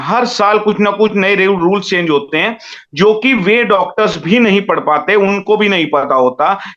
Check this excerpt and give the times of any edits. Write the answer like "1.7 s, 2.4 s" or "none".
none